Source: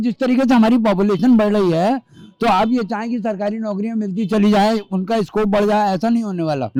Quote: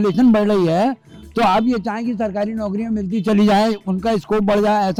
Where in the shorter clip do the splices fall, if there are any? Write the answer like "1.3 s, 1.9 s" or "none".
none

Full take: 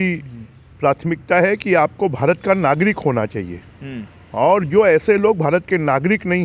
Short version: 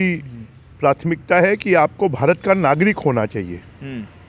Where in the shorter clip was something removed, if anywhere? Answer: none

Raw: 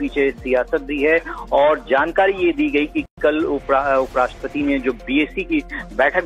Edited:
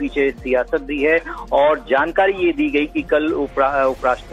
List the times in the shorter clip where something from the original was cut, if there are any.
3.0 s

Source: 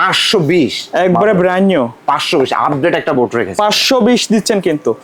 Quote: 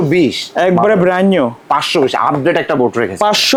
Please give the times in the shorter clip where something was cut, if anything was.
none

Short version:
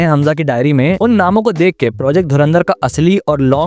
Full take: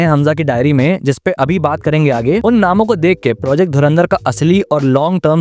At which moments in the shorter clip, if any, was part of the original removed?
1.0 s

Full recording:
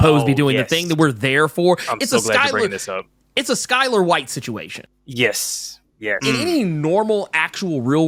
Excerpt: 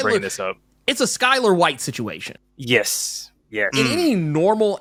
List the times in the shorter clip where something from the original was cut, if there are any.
none

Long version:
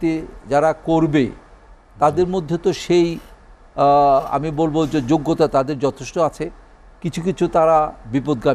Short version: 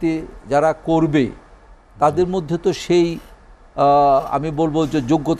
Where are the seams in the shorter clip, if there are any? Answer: none

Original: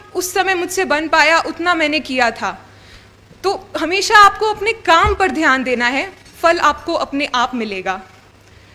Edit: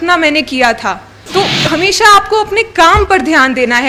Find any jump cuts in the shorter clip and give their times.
1.1 s

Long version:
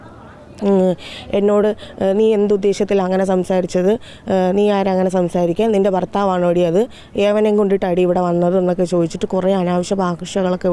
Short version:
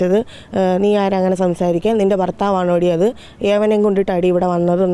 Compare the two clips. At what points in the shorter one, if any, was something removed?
none

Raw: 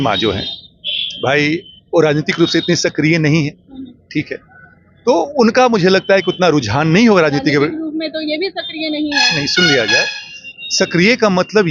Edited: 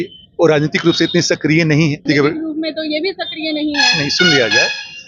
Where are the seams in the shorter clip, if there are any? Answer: 2.0 s

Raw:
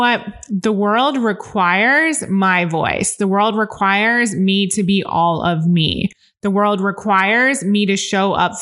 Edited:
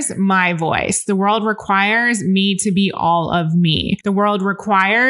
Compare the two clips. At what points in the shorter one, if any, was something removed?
4.0 s

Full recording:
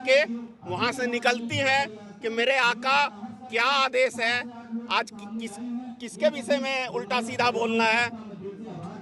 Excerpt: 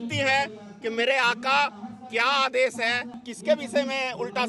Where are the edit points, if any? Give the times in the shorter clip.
3.2 s

